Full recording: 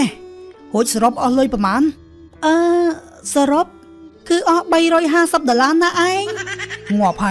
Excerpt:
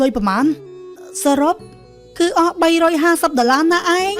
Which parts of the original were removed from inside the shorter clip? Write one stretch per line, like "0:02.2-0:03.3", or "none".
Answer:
0:02.3-0:03.0